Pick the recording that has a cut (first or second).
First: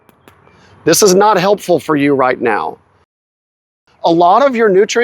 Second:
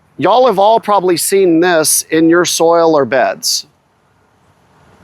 first